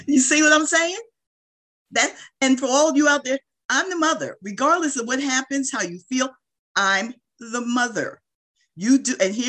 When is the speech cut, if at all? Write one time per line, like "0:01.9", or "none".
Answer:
none